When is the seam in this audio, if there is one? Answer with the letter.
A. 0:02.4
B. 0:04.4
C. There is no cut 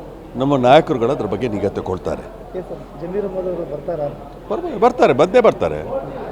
C